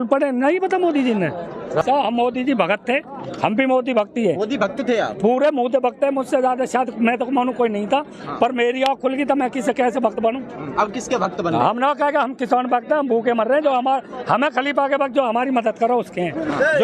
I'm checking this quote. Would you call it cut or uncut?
uncut